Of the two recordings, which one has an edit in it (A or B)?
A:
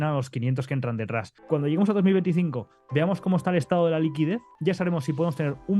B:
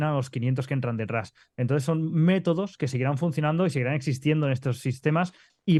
A